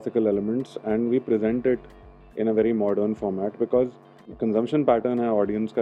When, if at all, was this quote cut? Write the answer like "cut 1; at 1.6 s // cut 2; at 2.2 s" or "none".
cut 1; at 4.3 s